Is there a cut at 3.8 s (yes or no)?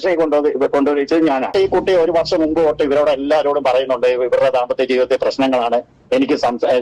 no